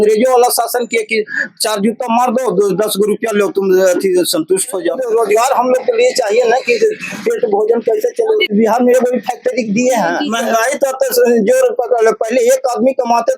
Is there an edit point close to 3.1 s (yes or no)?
no